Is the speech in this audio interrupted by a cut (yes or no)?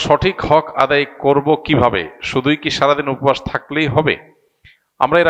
no